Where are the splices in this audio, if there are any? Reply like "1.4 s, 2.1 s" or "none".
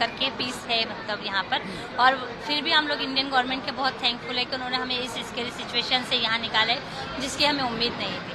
none